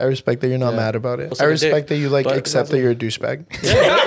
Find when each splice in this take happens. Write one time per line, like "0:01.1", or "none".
0:01.3